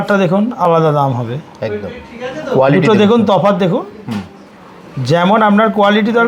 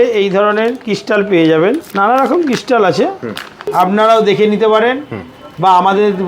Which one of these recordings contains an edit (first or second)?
second